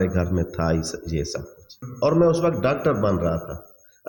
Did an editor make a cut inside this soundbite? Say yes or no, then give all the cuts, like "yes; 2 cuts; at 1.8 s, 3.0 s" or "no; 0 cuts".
yes; 1 cut; at 1.8 s